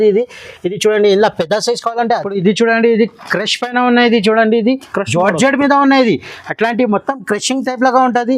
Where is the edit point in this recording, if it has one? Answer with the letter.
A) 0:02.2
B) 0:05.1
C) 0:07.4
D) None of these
A